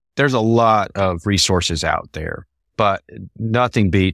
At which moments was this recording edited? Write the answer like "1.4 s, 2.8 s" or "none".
none